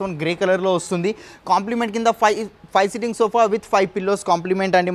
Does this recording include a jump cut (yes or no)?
no